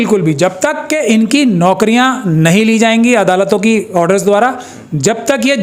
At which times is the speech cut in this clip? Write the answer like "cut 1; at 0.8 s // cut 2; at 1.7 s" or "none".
none